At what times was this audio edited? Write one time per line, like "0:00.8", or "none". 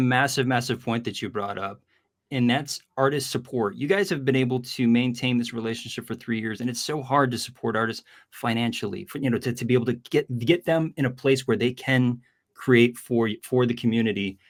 none